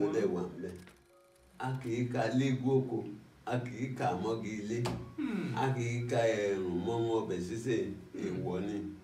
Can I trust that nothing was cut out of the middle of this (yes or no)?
no